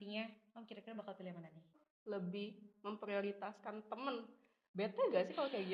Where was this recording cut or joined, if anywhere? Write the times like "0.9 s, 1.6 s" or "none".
1.8 s